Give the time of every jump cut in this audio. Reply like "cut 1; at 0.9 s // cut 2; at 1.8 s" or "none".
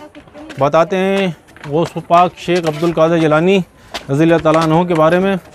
none

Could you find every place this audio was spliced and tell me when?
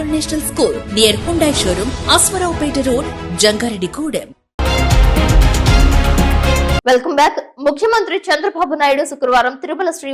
none

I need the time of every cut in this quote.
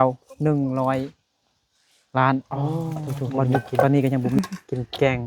cut 1; at 4.4 s

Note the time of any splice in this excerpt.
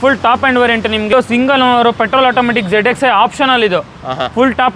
cut 1; at 1.1 s

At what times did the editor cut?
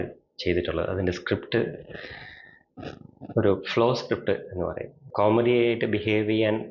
cut 1; at 5.0 s

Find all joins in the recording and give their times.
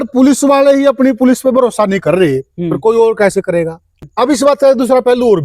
cut 1; at 4.0 s

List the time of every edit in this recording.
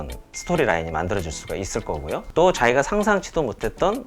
cut 1; at 2.3 s

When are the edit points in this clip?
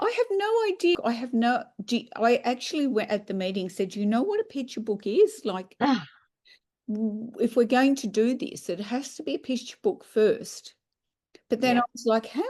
cut 1; at 1.0 s

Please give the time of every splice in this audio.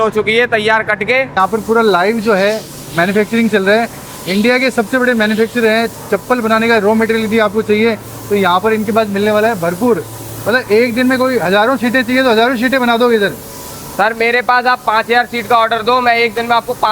cut 1; at 1.4 s

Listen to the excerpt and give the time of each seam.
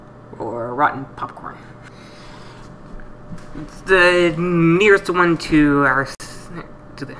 cut 1; at 1.9 s

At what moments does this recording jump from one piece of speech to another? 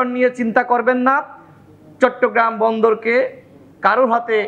none

